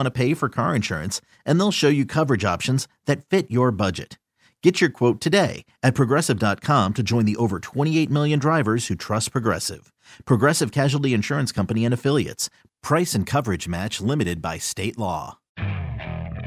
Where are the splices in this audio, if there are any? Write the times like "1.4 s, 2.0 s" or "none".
15.5 s

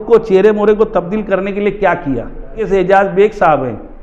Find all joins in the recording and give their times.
2.7 s

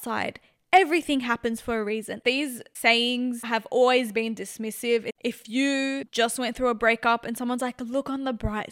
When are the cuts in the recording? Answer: 2.1 s, 5.1 s, 6.1 s

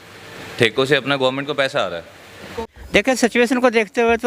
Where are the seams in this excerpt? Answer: 2.6 s

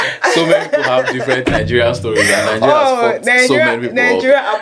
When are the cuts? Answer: none

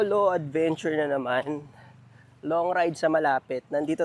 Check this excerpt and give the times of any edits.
none

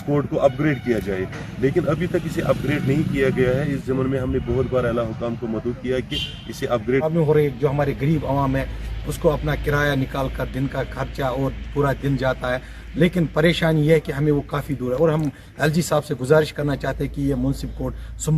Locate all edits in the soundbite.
7.1 s

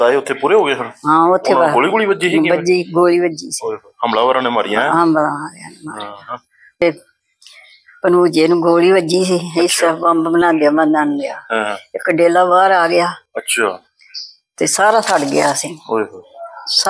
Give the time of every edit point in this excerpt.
6.8 s

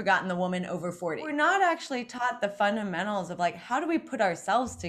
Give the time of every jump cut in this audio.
1.3 s

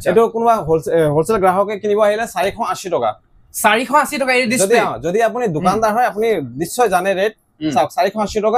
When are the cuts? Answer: none

